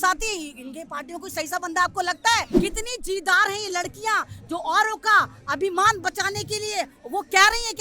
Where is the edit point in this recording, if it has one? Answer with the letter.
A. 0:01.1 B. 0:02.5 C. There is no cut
B